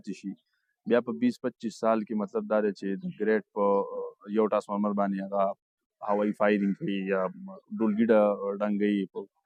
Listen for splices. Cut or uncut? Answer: uncut